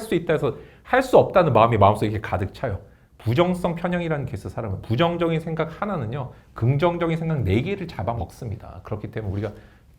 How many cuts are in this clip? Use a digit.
1